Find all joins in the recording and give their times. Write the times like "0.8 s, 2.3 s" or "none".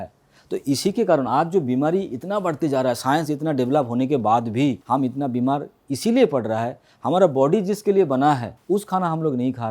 4.8 s, 8.5 s